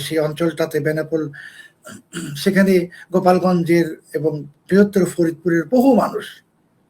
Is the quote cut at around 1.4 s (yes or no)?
no